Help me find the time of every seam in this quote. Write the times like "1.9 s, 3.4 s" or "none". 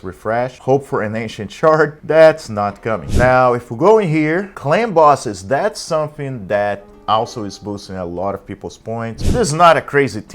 3.1 s, 9.2 s